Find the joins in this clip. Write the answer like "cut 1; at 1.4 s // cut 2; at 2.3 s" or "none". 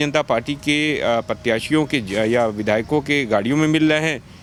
none